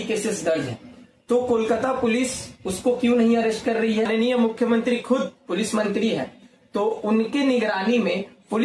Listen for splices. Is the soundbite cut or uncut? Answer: cut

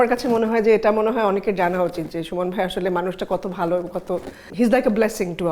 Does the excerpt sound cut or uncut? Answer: uncut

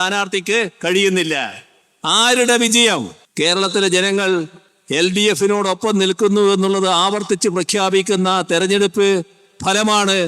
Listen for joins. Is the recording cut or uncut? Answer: cut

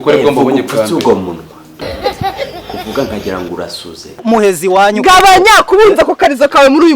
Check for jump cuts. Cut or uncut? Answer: cut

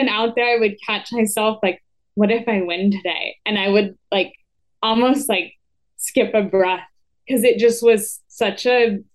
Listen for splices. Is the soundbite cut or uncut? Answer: uncut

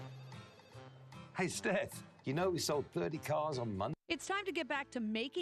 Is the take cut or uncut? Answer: cut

